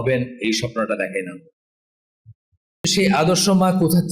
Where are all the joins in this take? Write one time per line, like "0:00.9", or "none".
0:02.8